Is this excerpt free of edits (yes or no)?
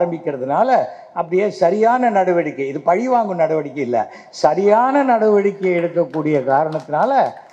yes